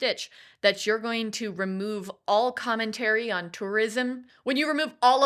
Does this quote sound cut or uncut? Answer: cut